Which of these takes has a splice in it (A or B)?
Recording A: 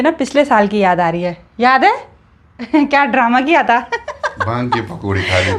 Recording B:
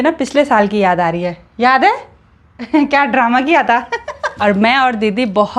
B